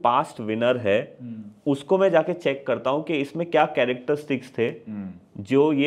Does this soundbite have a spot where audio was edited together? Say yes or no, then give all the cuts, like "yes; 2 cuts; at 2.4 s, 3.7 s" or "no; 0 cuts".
no; 0 cuts